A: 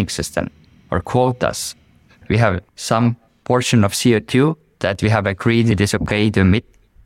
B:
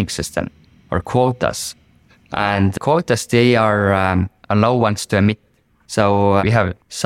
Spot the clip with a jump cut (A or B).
A